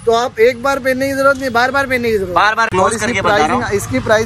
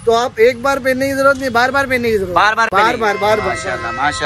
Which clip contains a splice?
first; 1 cut; at 2.7 s

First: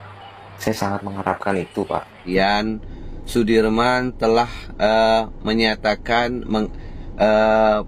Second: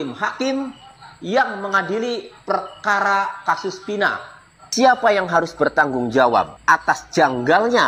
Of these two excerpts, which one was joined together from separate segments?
first; 1 cut; at 2.3 s

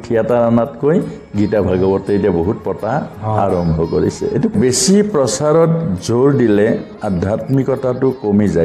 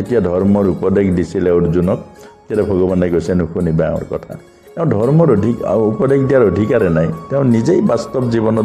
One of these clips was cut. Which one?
first; 1 cut; at 4.5 s

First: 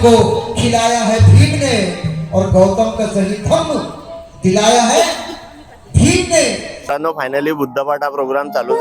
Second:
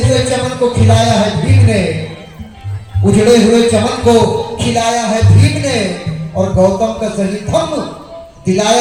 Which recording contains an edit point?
first; 1 cut; at 6.9 s

